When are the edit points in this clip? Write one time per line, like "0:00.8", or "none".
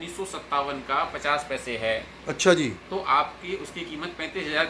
none

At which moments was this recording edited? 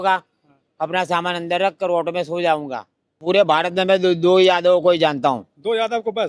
0:03.2

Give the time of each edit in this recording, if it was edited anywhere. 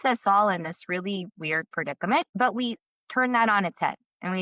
0:02.3

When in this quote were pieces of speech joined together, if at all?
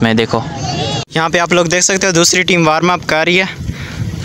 0:01.0

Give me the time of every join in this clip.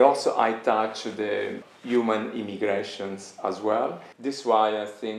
0:04.1

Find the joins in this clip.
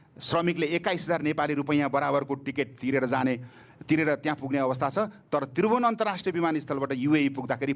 none

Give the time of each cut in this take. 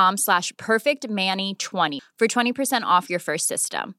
0:01.9

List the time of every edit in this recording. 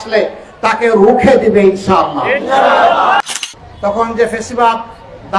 0:03.2

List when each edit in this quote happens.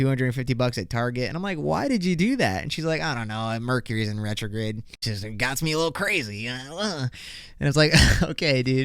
0:05.1

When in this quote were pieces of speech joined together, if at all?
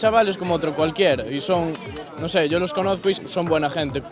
none

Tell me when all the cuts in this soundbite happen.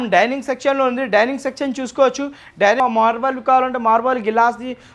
0:02.8

